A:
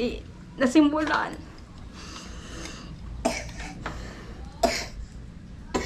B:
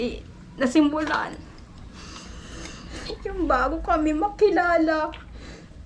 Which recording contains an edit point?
B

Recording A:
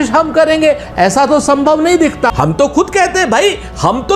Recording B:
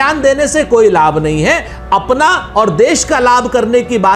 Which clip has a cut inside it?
A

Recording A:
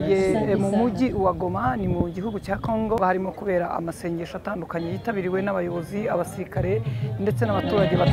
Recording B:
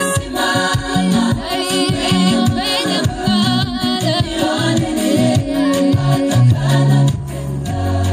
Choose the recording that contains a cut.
A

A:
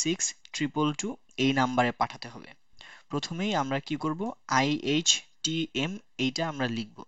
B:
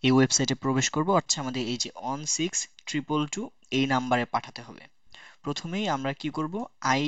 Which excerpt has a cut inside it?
B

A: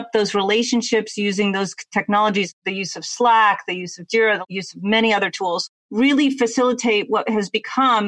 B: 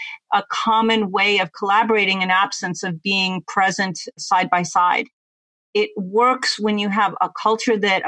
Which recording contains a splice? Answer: A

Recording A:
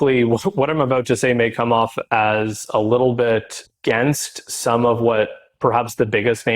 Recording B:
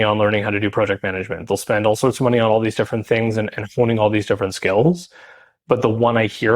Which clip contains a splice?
A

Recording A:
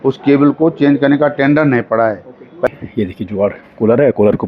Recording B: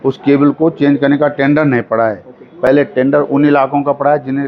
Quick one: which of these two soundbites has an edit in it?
A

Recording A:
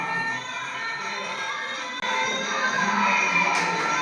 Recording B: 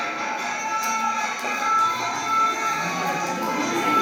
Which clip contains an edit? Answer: A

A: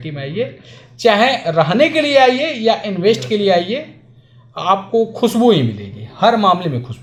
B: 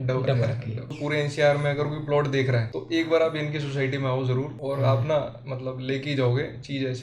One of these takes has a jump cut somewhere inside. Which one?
B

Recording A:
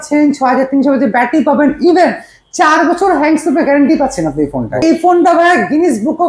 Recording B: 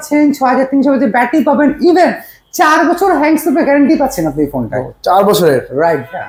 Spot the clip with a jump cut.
A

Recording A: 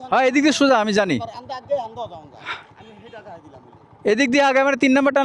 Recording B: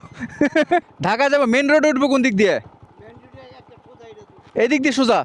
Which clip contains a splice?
B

